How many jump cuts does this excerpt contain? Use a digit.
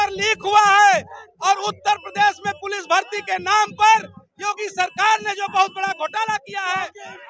0